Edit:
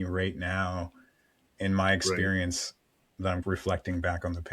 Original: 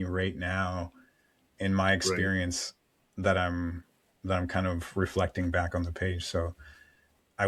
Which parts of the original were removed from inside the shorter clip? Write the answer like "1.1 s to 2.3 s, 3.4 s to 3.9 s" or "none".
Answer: 3.2 s to 4.7 s